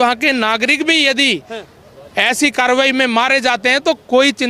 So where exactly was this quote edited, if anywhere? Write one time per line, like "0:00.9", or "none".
none